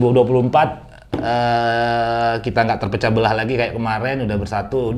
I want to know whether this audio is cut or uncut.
uncut